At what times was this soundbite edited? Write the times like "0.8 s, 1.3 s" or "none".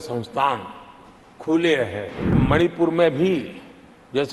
2.4 s